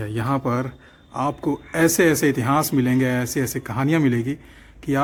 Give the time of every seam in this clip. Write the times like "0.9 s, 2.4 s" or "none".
none